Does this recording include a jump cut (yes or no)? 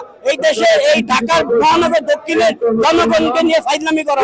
no